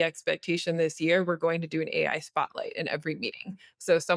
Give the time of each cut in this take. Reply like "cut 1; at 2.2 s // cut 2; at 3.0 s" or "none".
none